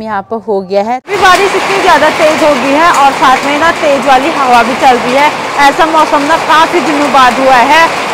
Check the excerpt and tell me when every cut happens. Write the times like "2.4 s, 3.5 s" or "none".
1.0 s